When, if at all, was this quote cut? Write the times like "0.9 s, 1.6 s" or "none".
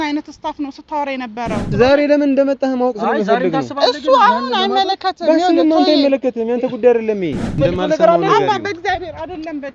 1.7 s, 7.5 s